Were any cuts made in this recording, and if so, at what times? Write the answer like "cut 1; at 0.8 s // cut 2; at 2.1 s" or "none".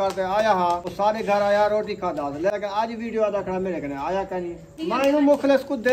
cut 1; at 0.9 s // cut 2; at 2.5 s // cut 3; at 4.7 s